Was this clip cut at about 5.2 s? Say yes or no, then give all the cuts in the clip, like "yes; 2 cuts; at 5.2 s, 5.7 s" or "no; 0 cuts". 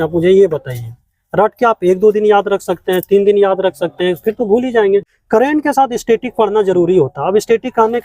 yes; 1 cut; at 5.2 s